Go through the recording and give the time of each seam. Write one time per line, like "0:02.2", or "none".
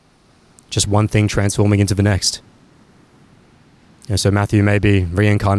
none